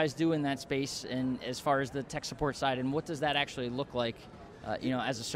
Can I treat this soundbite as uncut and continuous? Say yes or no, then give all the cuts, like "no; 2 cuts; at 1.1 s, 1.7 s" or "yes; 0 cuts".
yes; 0 cuts